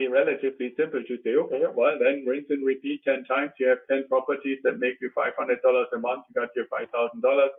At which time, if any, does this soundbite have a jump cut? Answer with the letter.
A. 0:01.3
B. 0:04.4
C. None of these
C